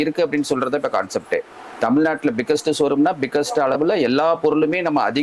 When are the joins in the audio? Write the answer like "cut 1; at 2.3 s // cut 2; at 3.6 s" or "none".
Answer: none